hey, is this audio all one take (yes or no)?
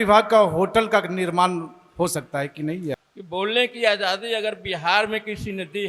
no